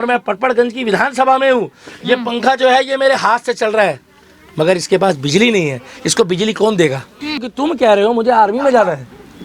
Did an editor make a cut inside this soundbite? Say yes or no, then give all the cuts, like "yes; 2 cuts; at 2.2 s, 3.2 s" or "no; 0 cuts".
yes; 1 cut; at 7.5 s